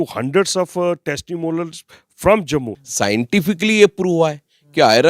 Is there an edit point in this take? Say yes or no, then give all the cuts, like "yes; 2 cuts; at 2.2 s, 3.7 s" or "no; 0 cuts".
yes; 1 cut; at 2.8 s